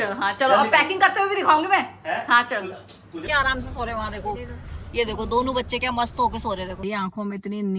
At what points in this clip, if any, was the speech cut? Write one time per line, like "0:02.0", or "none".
0:03.2
0:06.7